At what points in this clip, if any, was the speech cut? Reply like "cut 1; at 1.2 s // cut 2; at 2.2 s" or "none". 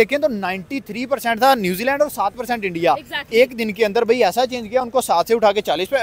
none